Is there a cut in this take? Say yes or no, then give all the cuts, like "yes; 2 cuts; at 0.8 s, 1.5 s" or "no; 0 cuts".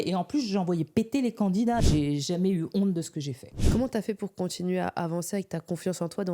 yes; 2 cuts; at 1.8 s, 3.6 s